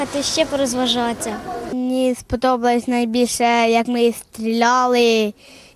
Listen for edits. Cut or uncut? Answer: cut